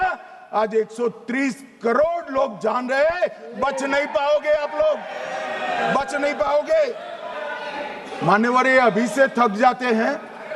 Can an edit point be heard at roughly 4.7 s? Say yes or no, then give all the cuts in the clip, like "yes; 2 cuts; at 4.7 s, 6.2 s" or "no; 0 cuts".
no; 1 cut; at 7.3 s